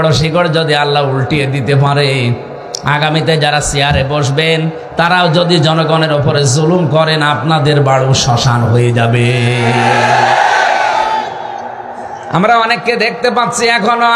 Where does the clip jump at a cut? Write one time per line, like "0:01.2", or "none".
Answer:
none